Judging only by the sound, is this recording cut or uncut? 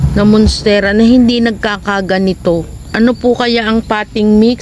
cut